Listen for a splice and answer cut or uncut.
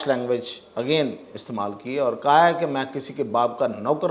uncut